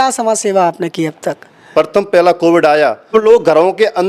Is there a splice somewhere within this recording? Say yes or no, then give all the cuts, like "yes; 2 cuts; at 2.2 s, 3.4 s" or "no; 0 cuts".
yes; 2 cuts; at 1.5 s, 3.1 s